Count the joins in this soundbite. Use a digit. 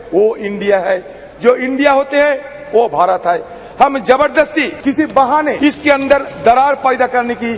2